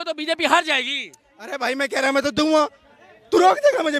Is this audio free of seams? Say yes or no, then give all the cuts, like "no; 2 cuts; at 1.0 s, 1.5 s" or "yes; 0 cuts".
yes; 0 cuts